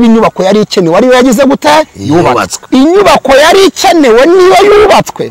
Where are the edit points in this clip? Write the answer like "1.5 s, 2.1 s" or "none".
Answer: 2.5 s